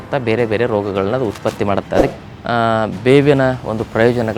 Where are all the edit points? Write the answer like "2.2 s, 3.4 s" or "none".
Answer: 2.1 s